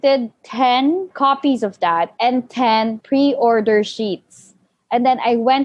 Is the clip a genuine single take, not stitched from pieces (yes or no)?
no